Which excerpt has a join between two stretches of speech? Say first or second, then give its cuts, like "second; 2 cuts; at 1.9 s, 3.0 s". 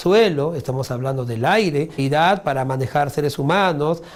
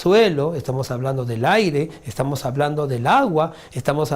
second; 1 cut; at 1.9 s